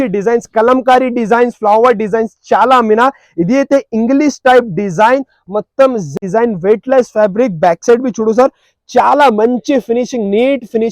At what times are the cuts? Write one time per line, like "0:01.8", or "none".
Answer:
0:06.1